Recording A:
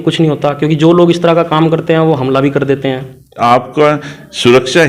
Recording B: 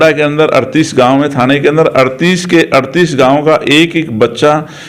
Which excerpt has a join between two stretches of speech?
A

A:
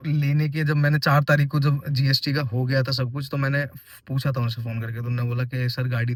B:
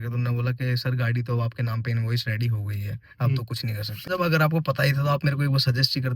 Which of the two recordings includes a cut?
B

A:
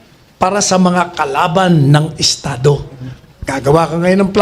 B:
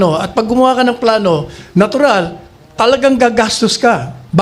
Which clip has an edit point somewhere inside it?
A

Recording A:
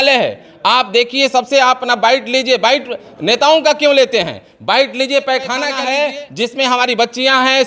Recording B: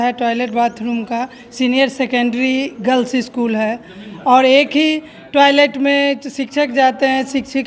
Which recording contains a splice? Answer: A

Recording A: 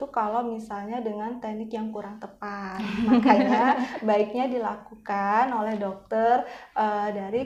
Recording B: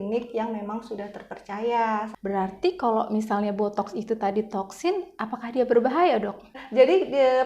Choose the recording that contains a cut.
B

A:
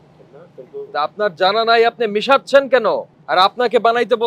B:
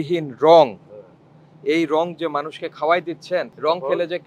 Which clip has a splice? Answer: A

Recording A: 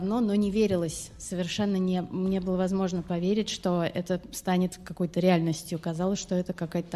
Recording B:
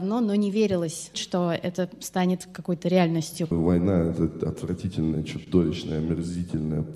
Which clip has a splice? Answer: B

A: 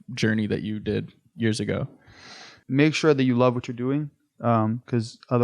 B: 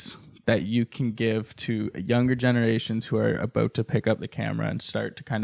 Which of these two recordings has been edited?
A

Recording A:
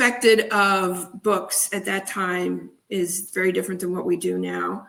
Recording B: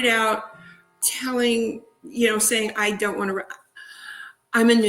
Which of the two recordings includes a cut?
B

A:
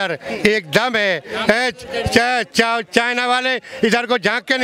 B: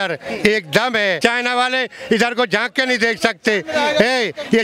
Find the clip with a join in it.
B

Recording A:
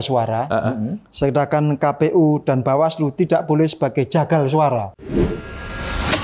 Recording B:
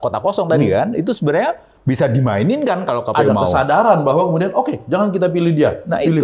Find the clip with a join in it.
A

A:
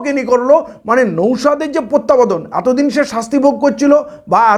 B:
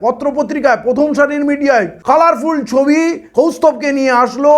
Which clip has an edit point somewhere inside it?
B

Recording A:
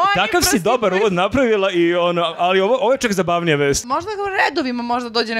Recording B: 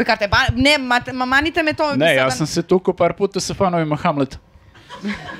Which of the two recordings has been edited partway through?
A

